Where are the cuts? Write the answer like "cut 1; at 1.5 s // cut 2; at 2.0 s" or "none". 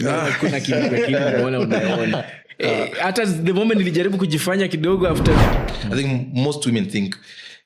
cut 1; at 5.6 s

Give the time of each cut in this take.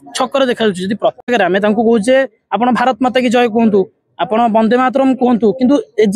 cut 1; at 1.2 s

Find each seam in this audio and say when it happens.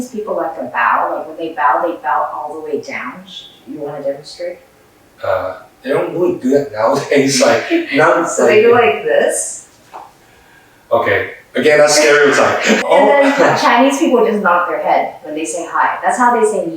cut 1; at 12.8 s

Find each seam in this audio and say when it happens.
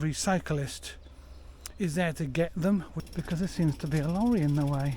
cut 1; at 3.0 s

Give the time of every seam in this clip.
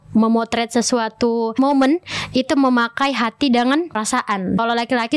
cut 1; at 1.5 s // cut 2; at 4.1 s

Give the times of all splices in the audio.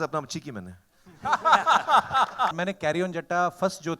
cut 1; at 2.6 s

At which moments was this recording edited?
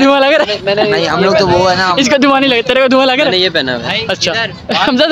none

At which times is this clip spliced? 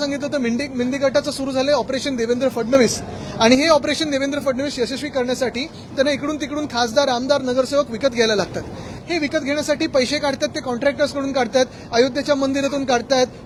none

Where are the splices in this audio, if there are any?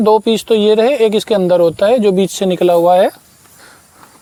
none

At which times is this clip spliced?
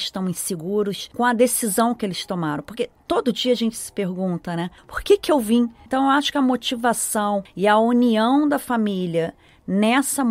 cut 1; at 1.0 s // cut 2; at 5.8 s // cut 3; at 7.5 s

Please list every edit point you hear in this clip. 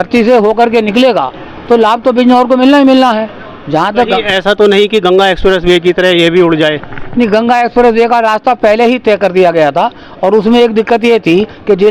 none

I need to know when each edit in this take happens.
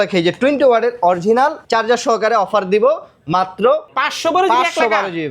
cut 1; at 1.6 s // cut 2; at 3.9 s

